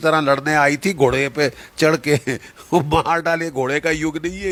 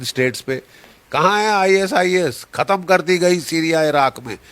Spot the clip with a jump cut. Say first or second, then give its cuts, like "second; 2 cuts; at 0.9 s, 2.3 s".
second; 1 cut; at 1.1 s